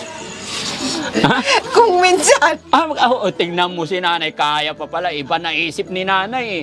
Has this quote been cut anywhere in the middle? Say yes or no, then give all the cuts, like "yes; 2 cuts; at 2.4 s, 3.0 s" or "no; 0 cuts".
no; 0 cuts